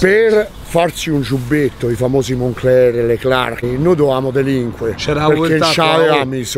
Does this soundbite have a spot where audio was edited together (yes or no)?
yes